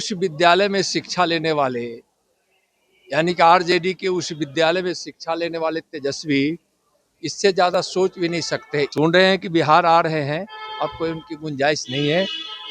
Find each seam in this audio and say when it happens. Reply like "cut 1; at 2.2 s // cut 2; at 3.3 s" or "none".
cut 1; at 8.9 s